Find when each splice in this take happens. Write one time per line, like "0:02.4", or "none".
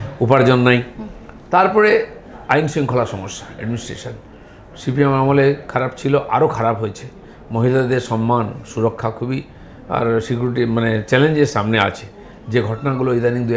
none